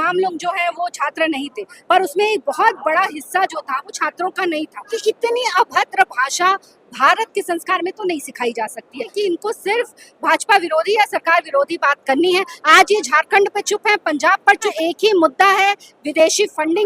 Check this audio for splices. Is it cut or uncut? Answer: cut